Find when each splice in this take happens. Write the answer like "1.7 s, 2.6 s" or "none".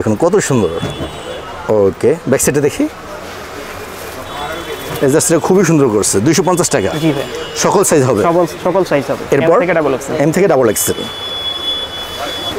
none